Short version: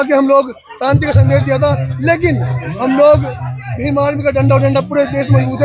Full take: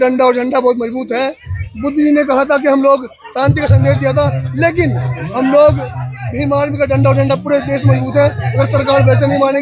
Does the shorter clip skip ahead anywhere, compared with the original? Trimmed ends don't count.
no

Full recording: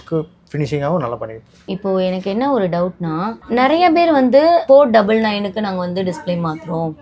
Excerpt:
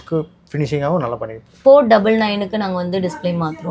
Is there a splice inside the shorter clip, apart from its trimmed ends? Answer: yes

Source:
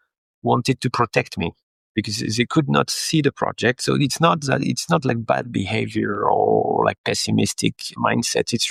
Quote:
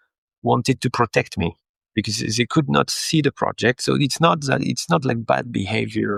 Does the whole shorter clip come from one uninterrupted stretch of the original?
yes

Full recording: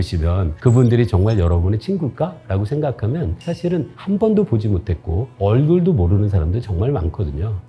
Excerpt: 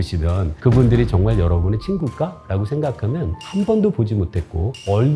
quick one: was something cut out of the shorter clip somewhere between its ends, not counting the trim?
yes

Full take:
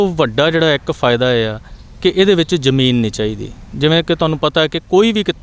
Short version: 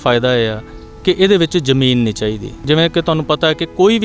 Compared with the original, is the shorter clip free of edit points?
no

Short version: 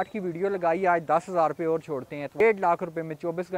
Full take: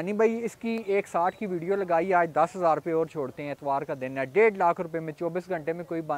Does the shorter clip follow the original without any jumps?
no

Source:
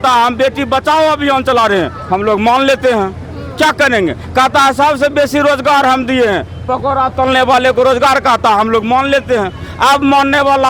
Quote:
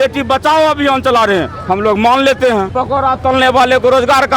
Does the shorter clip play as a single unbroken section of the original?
no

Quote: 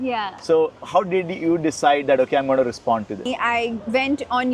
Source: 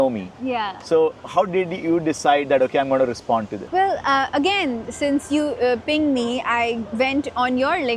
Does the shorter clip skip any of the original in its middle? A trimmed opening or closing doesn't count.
yes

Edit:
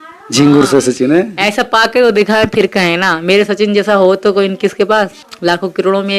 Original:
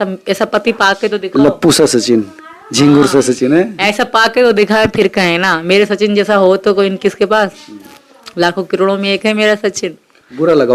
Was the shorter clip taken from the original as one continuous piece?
no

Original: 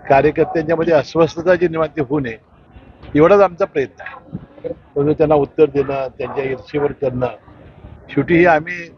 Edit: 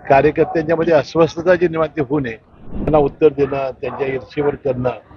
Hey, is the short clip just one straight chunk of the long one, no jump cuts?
no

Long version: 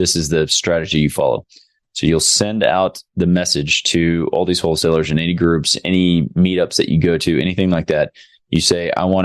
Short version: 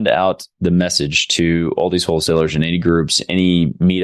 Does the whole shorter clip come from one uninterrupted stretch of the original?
yes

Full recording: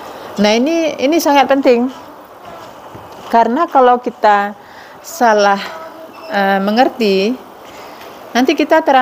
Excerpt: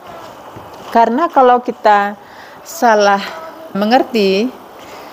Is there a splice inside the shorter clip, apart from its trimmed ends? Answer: yes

